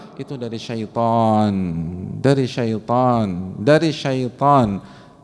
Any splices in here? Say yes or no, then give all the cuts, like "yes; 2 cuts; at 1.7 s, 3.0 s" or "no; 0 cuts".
no; 0 cuts